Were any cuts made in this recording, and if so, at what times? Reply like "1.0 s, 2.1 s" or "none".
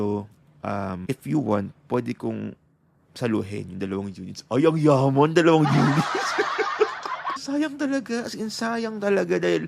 1.0 s, 7.4 s